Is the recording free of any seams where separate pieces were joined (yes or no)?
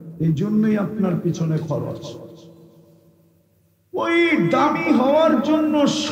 yes